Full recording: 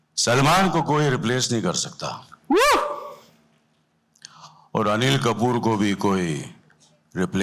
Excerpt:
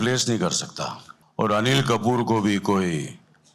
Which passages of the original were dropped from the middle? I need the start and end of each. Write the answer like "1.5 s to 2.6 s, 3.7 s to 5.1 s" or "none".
2.3 s to 4.4 s